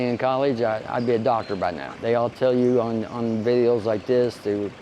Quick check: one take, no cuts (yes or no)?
no